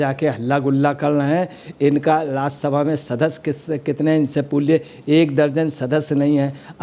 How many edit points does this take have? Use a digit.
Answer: 0